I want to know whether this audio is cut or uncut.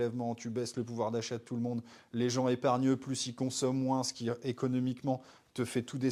uncut